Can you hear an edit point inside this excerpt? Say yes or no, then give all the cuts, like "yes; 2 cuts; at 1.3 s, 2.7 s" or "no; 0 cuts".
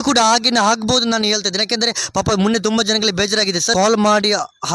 yes; 1 cut; at 3.7 s